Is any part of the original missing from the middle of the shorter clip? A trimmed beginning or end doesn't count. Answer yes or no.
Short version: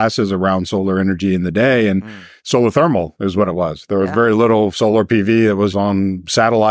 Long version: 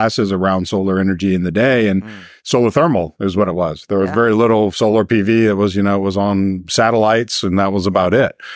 yes